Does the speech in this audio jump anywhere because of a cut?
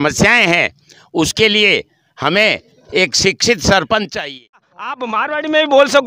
yes; 1 cut; at 4.9 s

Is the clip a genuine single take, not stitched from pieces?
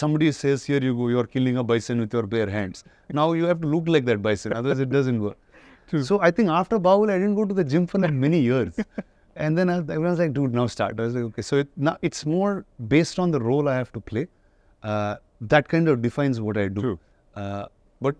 yes; 0 cuts

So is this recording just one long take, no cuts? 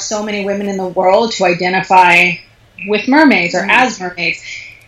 yes; 0 cuts

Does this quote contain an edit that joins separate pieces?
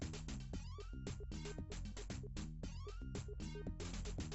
no; 0 cuts

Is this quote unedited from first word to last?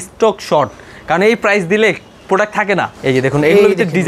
no; 1 cut; at 2.9 s

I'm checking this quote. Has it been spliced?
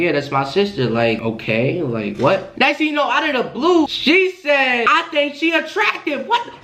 yes; 2 cuts; at 2.5 s, 3.9 s

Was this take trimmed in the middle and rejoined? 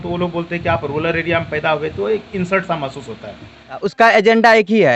yes; 1 cut; at 3.8 s

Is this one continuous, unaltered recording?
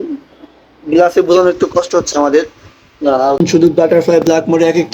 no; 1 cut; at 3.4 s

